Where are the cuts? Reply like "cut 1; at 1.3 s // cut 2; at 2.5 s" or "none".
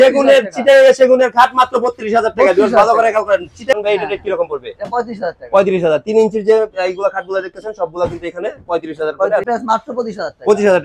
cut 1; at 3.7 s // cut 2; at 9.4 s